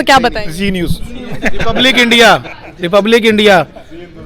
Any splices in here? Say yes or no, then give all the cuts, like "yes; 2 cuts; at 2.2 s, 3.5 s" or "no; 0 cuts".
no; 0 cuts